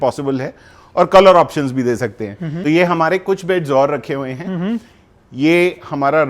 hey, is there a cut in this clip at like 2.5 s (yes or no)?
yes